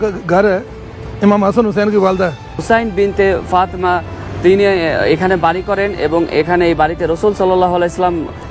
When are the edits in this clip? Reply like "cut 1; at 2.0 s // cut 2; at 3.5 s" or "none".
cut 1; at 2.6 s